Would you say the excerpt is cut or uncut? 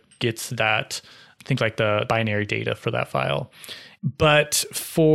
uncut